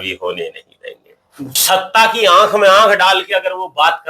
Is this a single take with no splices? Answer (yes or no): no